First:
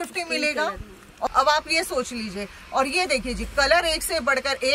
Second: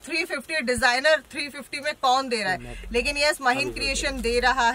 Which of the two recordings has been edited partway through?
first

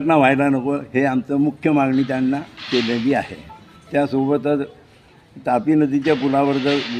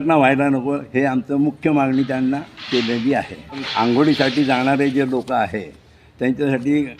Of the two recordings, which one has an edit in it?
second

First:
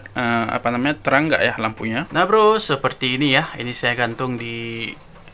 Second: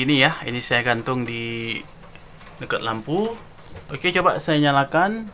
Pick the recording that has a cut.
first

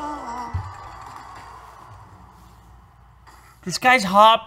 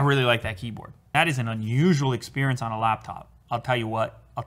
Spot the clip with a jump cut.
second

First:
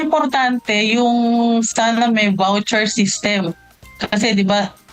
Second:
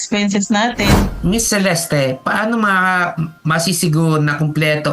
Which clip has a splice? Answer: second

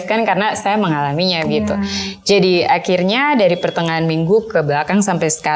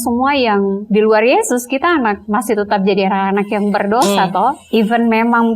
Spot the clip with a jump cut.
second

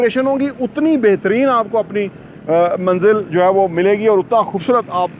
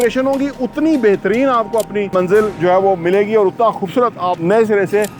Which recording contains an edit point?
second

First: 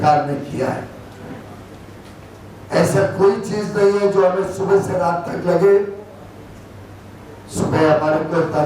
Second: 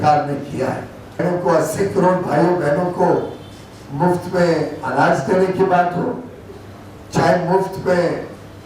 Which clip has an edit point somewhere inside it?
second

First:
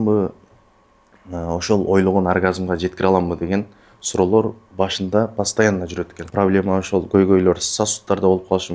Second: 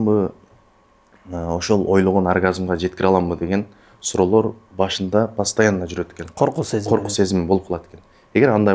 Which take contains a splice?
first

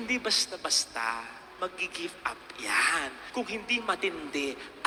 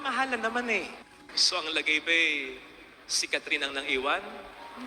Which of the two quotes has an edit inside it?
second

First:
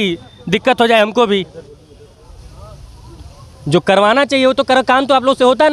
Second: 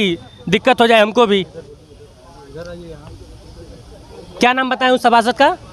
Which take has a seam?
first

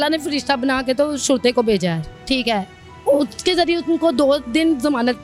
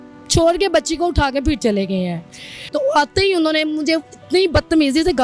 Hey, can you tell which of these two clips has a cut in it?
second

